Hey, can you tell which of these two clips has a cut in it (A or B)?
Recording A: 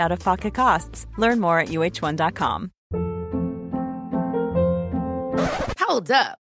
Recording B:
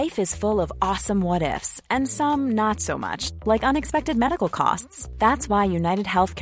A